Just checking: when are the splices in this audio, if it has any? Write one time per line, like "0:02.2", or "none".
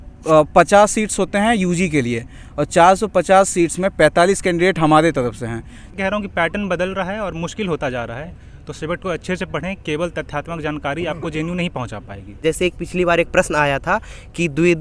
0:05.9
0:12.4

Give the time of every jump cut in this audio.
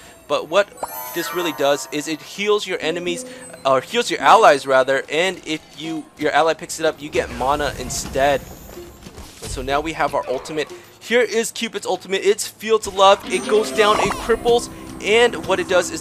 none

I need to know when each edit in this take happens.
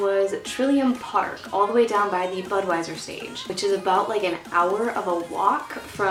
none

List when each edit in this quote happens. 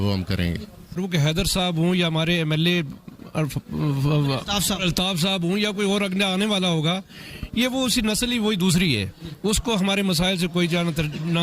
0:01.0

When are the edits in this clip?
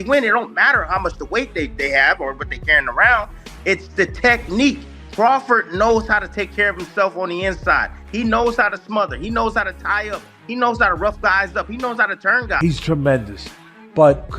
0:12.5

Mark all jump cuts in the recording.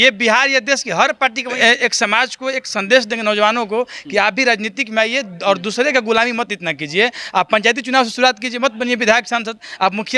0:01.5

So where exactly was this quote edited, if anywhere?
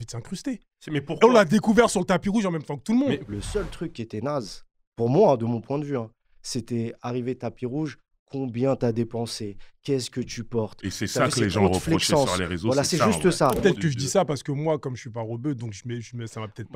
0:03.2
0:13.6

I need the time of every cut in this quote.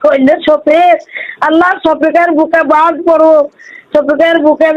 none

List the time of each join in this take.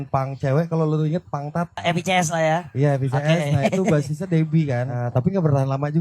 0:01.8
0:05.0

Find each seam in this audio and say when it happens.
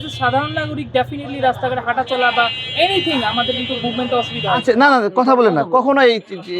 0:04.6

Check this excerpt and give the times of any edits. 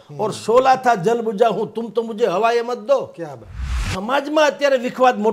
0:03.9

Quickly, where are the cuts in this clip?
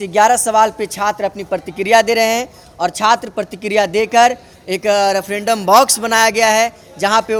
none

